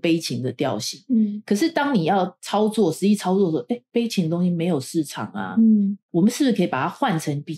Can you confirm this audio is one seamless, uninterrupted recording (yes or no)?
yes